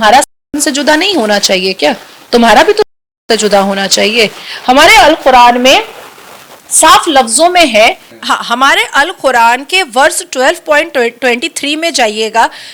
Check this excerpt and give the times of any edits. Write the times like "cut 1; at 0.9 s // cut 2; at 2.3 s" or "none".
none